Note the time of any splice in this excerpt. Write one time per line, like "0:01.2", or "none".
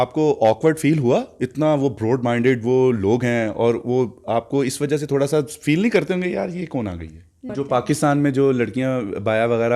0:07.5